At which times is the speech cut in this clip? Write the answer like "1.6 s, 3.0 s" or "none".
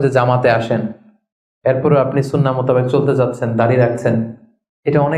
none